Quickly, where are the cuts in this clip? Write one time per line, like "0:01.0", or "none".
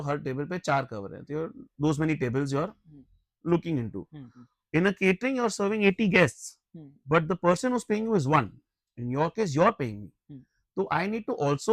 none